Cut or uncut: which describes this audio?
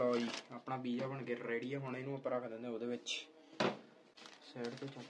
uncut